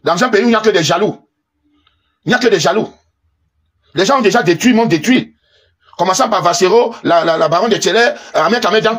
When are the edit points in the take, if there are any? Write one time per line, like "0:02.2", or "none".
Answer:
none